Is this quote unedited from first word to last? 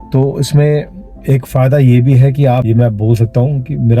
no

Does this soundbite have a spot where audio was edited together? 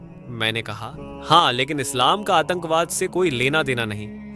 no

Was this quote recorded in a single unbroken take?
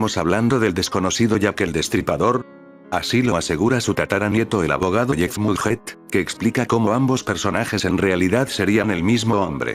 no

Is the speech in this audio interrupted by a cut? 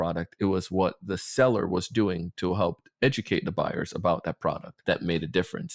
yes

